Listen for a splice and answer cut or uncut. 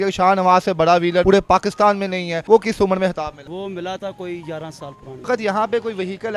cut